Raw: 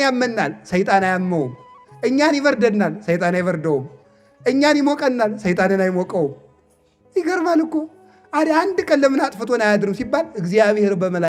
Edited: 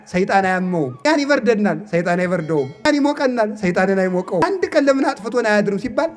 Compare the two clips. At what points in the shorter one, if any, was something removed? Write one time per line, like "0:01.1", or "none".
0:01.1
0:02.9
0:04.4